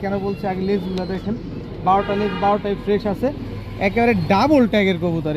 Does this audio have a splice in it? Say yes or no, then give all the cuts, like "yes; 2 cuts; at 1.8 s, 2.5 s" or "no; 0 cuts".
no; 0 cuts